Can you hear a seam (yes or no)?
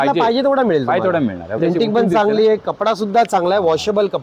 yes